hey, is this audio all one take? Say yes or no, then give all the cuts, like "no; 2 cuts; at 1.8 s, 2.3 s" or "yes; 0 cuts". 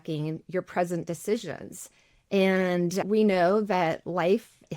no; 1 cut; at 3.0 s